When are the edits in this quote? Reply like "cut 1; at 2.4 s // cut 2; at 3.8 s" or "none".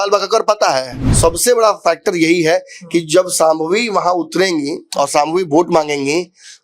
cut 1; at 1.0 s